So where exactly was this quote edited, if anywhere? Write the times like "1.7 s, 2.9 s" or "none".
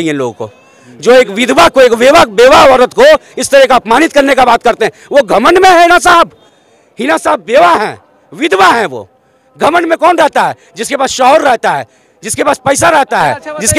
none